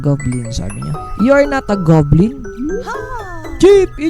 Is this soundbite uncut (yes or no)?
no